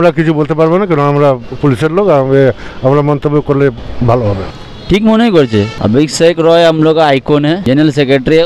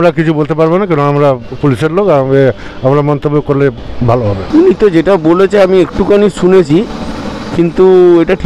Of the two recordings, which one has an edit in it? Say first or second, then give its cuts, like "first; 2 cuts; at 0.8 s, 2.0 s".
first; 3 cuts; at 4.5 s, 5.7 s, 7.6 s